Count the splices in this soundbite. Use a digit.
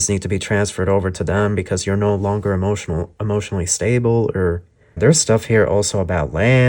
1